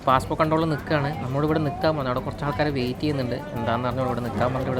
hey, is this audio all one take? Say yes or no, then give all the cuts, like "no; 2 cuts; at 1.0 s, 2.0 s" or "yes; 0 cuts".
yes; 0 cuts